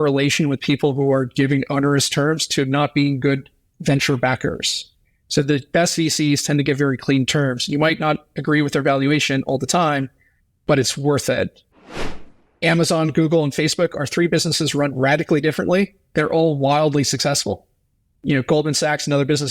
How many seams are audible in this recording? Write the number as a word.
one